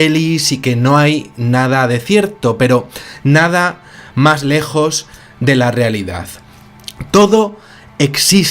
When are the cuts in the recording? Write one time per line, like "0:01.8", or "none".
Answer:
0:01.3